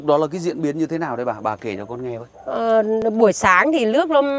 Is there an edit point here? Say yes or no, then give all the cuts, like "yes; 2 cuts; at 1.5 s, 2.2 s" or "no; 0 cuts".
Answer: no; 0 cuts